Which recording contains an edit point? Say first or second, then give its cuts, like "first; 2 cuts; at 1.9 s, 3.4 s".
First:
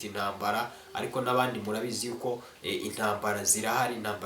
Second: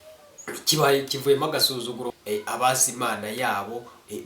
second; 1 cut; at 2.1 s